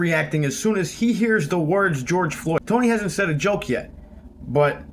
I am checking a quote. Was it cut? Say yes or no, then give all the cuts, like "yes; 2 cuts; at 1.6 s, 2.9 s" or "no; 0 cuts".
yes; 1 cut; at 2.6 s